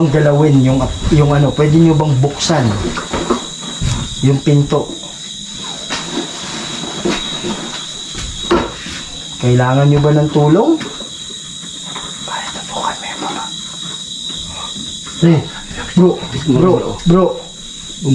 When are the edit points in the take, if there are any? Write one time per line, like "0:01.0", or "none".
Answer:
none